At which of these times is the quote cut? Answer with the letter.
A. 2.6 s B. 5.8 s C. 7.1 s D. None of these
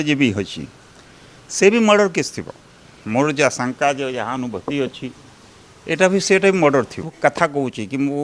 C